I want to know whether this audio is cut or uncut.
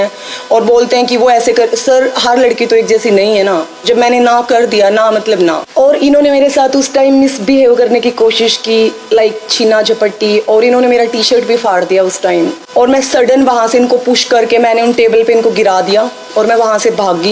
cut